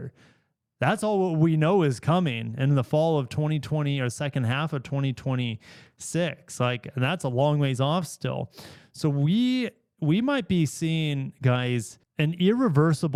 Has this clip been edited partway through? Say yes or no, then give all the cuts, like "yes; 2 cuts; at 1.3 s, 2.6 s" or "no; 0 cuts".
no; 0 cuts